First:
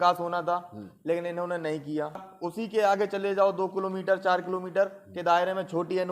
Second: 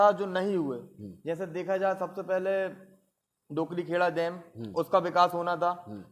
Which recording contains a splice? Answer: first; 1 cut; at 2.3 s

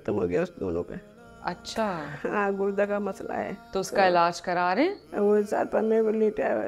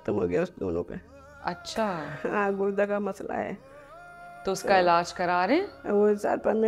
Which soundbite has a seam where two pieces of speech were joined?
first; 1 cut; at 3.6 s

